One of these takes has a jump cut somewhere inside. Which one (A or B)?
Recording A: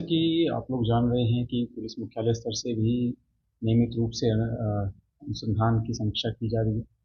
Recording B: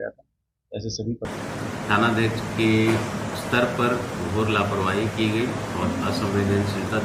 B